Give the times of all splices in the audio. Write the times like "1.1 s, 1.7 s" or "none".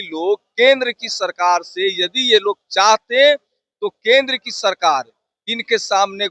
none